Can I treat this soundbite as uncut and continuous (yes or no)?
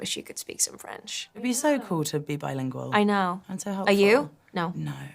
no